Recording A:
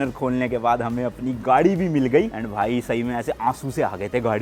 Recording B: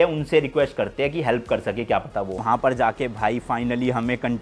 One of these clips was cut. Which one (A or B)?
B